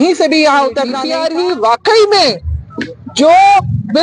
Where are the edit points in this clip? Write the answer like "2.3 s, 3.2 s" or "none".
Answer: 1.0 s